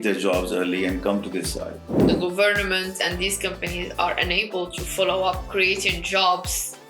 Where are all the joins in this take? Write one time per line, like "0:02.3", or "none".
0:02.0